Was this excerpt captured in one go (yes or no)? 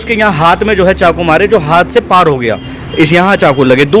yes